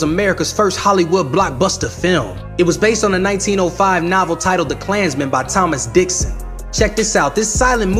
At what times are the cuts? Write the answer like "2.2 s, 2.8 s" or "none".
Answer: none